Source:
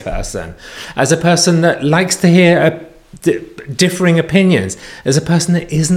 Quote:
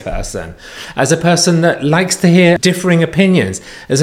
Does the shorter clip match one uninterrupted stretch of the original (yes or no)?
no